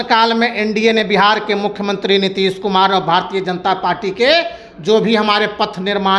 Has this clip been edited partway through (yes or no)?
no